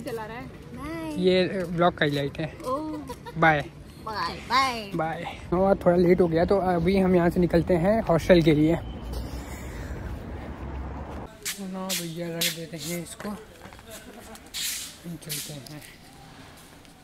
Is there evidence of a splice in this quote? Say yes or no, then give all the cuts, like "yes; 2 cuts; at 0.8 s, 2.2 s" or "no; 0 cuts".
no; 0 cuts